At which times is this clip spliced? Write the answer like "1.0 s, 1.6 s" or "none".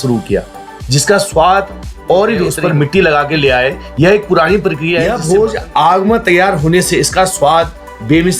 2.5 s, 5.1 s